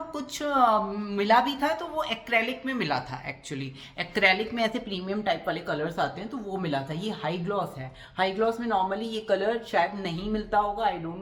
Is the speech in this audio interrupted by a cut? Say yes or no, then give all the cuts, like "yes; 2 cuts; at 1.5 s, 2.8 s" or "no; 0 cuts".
no; 0 cuts